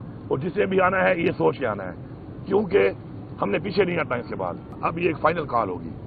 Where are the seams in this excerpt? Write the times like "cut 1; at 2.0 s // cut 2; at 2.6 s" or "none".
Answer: cut 1; at 4.8 s